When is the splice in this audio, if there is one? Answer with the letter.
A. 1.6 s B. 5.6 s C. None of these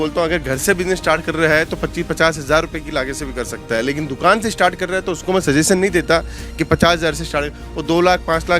B